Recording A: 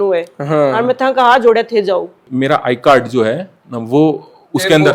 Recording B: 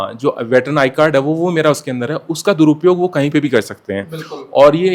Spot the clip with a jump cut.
A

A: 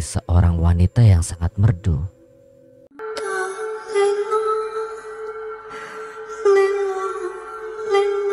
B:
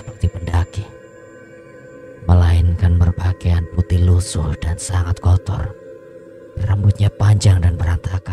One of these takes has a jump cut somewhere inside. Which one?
A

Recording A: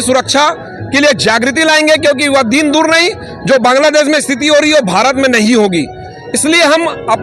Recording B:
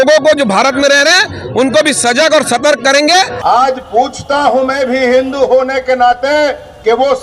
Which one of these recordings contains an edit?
B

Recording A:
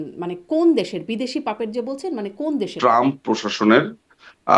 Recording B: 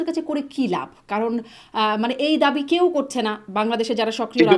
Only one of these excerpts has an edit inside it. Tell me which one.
A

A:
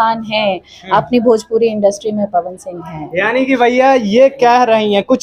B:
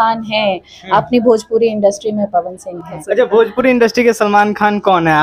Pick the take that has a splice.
B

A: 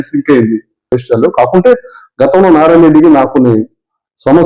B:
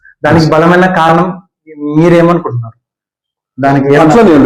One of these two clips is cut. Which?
A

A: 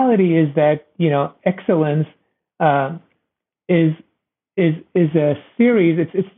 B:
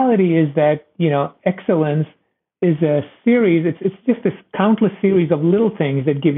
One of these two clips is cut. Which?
B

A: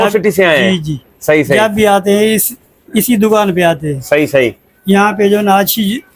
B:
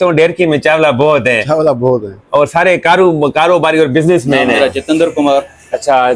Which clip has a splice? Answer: B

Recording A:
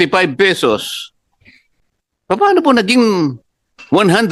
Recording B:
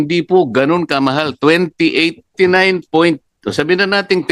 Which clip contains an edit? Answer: B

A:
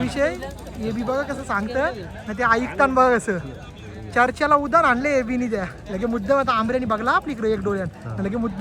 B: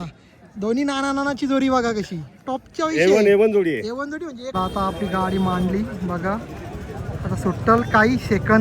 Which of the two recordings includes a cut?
B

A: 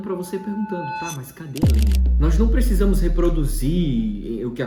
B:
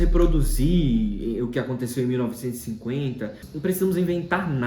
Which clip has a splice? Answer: B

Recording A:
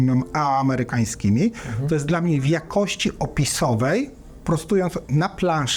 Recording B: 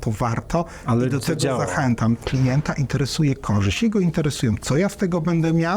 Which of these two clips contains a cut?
B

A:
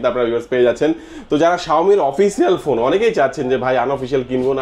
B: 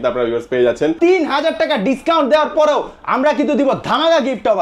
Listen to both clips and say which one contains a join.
B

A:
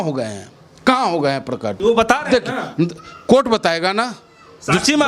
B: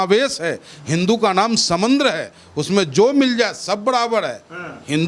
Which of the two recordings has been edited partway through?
A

